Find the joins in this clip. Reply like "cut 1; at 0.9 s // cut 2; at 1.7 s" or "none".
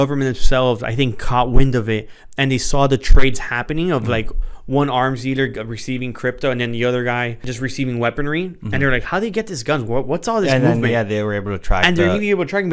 cut 1; at 7.5 s